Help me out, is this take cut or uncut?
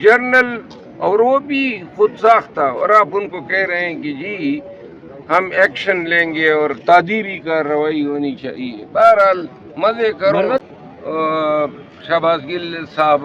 cut